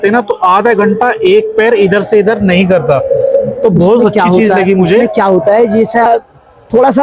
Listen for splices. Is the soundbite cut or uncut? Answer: cut